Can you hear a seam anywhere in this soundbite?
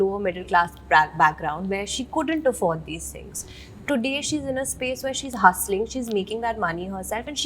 no; 0 cuts

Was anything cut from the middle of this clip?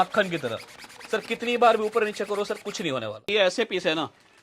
yes; 1 cut; at 3.3 s

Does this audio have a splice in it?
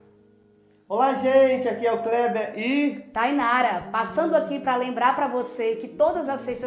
no; 0 cuts

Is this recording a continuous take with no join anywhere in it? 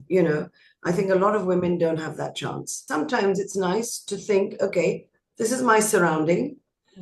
no; 1 cut; at 2.9 s

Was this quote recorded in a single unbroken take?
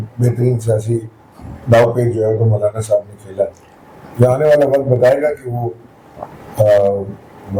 yes; 0 cuts

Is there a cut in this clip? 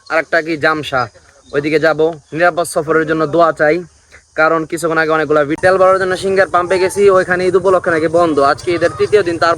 yes; 1 cut; at 5.5 s

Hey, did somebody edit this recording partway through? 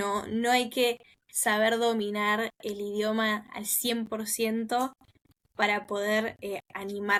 no; 0 cuts

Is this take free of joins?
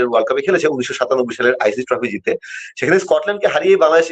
yes; 0 cuts

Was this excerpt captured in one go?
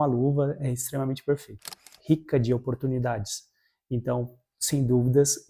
no; 1 cut; at 1.8 s

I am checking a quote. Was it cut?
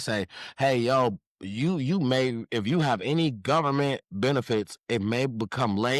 no; 0 cuts

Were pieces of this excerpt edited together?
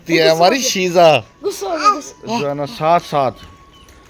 yes; 1 cut; at 2.4 s

